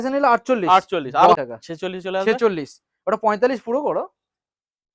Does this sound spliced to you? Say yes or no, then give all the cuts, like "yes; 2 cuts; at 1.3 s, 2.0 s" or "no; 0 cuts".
yes; 1 cut; at 1.4 s